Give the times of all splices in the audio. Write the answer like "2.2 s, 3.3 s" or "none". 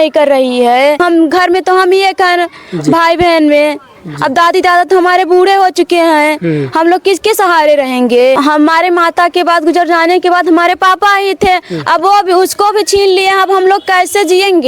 1.0 s, 8.4 s